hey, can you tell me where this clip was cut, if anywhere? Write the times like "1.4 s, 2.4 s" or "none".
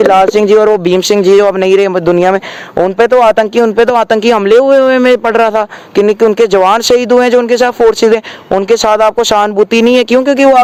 none